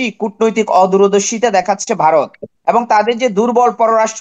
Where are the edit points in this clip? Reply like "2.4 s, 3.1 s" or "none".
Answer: 2.4 s